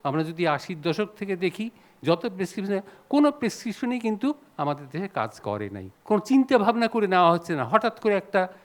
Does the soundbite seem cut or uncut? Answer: cut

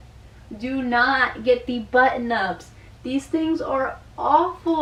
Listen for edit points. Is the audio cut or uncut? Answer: uncut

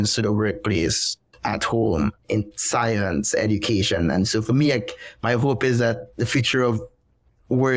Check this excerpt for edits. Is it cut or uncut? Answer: uncut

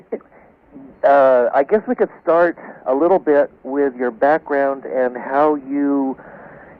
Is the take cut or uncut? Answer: cut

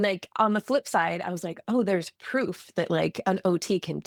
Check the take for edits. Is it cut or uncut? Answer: uncut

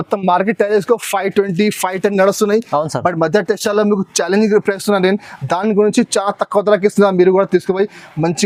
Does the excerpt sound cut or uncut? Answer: uncut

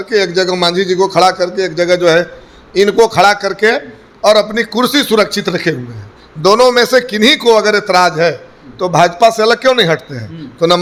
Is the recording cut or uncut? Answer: uncut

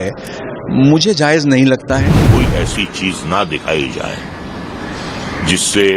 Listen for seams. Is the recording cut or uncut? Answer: cut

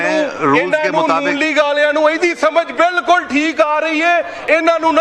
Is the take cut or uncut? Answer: uncut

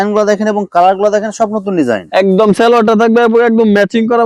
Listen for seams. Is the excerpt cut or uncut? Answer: uncut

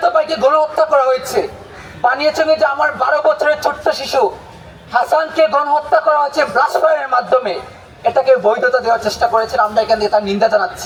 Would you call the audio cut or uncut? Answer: uncut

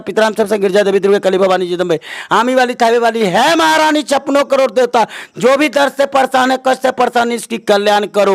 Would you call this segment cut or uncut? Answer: uncut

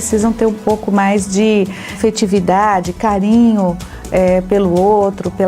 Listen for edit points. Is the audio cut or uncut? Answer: cut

